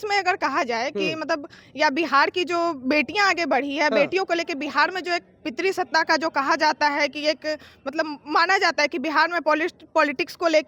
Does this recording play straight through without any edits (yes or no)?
yes